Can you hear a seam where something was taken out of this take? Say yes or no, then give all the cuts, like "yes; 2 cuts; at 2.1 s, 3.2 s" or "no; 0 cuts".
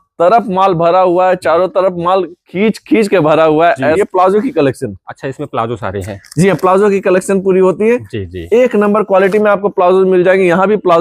yes; 2 cuts; at 2.4 s, 4.0 s